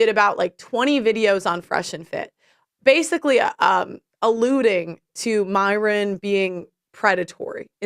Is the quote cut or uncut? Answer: cut